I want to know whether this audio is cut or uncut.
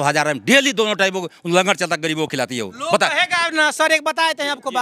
uncut